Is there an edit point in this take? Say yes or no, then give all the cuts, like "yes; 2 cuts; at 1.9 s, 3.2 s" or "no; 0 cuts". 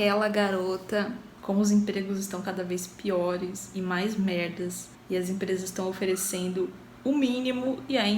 yes; 1 cut; at 1.3 s